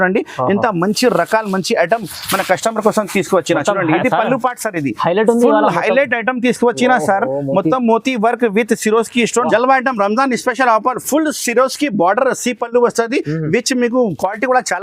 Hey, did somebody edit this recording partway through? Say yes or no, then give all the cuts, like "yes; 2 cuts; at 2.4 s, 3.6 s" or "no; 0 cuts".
yes; 1 cut; at 9.5 s